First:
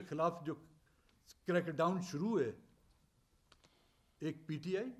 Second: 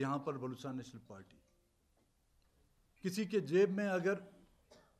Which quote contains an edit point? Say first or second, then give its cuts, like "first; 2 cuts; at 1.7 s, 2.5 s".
second; 1 cut; at 1.8 s